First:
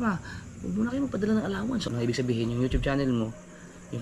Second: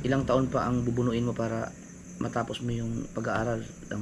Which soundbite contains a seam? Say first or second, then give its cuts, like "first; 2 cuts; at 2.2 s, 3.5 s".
first; 1 cut; at 1.9 s